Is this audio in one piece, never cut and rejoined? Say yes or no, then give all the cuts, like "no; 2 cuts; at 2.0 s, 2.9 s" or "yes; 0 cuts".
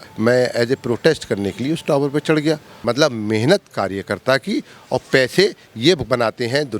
no; 1 cut; at 2.7 s